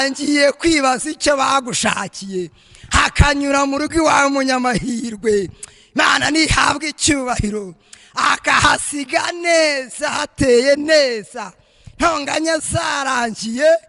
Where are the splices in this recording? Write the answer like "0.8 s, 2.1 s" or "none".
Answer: none